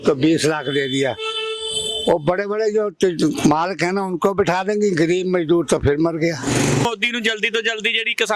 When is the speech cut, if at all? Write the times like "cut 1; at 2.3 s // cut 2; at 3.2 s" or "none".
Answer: cut 1; at 6.8 s

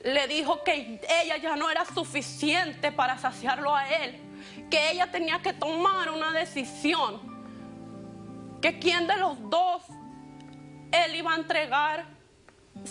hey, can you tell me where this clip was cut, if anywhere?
none

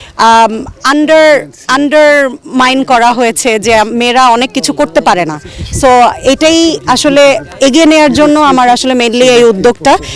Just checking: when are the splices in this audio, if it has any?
none

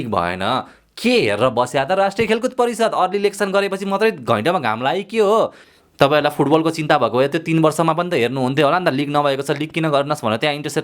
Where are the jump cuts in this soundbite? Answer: cut 1; at 5.6 s

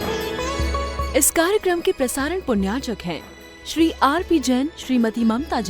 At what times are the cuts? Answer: cut 1; at 1.0 s

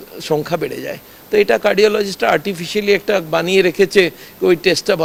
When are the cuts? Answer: none

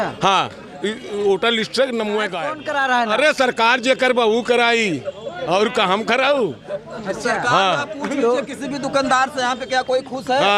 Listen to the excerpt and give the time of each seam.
cut 1; at 2.5 s

